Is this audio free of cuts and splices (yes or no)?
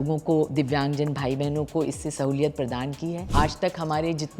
no